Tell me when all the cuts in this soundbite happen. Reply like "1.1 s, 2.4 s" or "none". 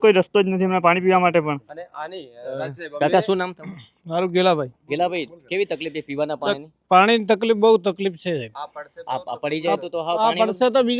none